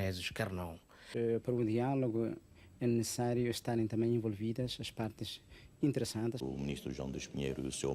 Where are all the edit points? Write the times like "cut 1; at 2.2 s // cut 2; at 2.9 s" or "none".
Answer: cut 1; at 1.1 s // cut 2; at 6.4 s